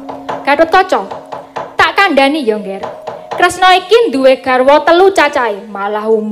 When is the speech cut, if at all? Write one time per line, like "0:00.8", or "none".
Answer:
0:03.6